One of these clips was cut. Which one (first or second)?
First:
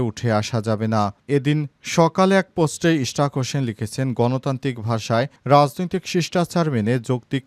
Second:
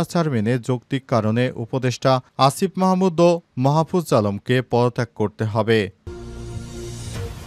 second